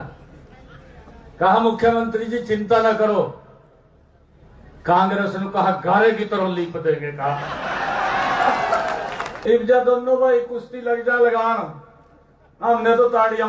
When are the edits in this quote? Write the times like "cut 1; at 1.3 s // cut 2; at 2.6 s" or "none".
cut 1; at 9.3 s